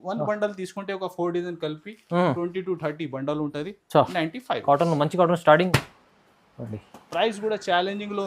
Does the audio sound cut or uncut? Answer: cut